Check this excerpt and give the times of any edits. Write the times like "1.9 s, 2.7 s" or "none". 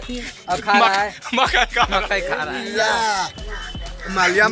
2.5 s